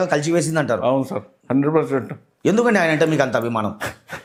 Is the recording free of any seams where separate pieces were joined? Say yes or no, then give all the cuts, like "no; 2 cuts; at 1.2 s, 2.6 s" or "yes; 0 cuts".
yes; 0 cuts